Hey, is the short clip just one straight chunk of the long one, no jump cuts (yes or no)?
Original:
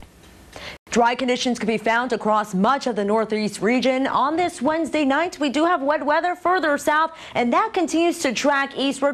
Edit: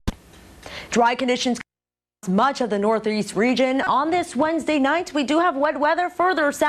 no